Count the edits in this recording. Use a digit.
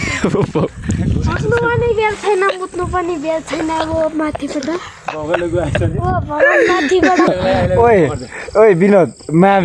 1